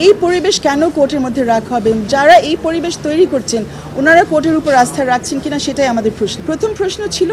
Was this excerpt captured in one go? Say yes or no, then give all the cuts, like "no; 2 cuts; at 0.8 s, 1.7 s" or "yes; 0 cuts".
yes; 0 cuts